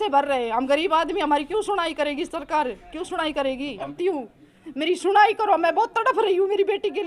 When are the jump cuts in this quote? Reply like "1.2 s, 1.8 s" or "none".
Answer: 3.9 s